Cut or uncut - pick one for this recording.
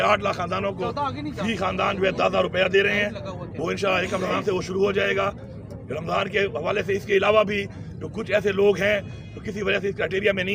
uncut